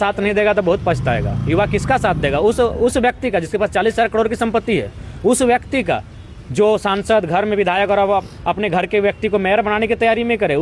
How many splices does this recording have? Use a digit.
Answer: 0